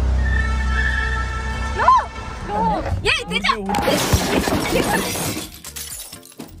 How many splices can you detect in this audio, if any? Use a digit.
1